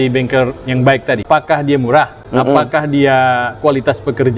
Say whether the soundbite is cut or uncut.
cut